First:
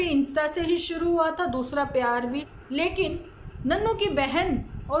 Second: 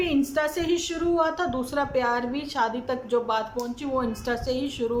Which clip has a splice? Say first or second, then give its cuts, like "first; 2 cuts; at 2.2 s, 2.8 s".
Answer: first; 1 cut; at 2.5 s